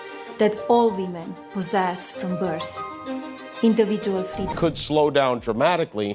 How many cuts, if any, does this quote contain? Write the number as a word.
one